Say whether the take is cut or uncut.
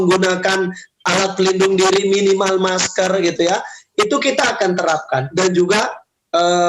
cut